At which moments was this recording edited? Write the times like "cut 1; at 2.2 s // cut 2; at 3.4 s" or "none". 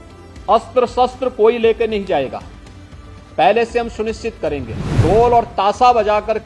cut 1; at 5.0 s